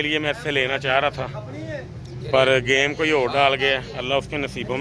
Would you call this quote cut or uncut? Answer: uncut